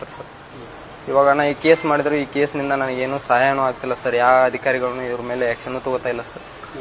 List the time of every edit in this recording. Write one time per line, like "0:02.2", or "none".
0:02.0

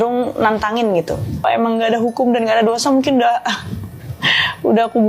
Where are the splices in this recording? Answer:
0:01.4

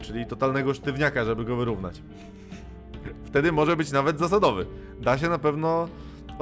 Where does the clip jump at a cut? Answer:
none

